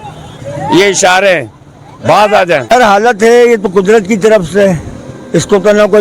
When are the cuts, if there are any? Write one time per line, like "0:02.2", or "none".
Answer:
0:02.7